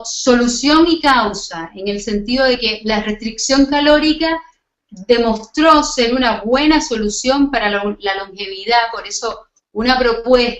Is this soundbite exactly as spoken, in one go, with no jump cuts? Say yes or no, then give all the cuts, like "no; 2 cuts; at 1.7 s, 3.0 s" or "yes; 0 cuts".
no; 1 cut; at 9.5 s